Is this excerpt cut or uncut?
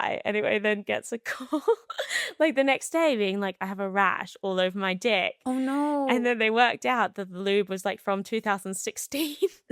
uncut